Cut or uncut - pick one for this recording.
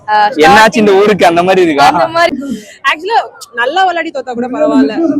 cut